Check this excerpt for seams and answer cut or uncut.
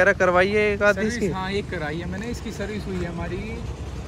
uncut